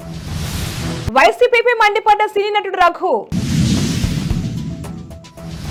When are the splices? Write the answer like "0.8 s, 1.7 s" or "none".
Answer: none